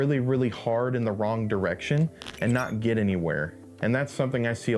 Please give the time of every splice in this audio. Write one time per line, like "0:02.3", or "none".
none